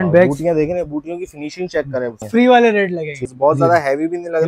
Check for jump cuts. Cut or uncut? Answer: cut